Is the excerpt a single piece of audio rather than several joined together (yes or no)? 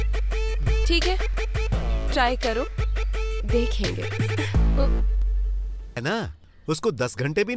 no